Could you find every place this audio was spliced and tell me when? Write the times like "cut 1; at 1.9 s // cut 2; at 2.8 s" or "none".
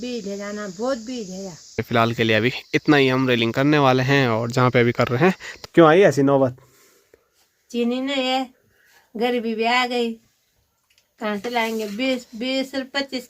cut 1; at 1.8 s // cut 2; at 5.5 s